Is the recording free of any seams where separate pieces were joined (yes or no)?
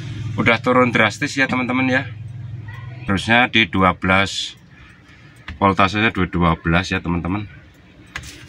no